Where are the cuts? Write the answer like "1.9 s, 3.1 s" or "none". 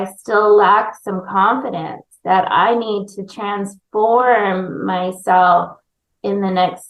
none